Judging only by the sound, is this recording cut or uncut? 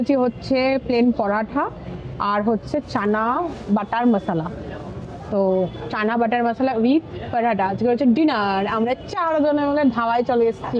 uncut